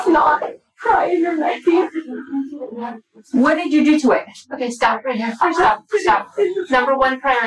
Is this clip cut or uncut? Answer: uncut